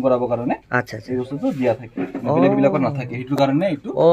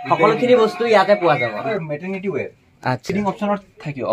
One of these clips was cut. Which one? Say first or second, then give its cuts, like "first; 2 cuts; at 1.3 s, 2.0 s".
second; 2 cuts; at 1.7 s, 3.0 s